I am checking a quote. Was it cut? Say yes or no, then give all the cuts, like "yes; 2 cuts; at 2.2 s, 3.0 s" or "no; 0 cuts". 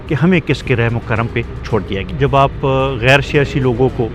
yes; 1 cut; at 2.0 s